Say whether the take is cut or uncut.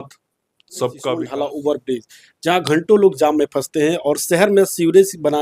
cut